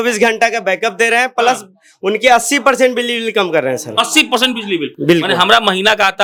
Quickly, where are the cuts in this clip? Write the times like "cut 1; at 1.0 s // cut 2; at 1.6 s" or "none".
none